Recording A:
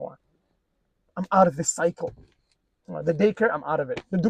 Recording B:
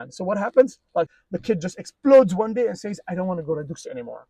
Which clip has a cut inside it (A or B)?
B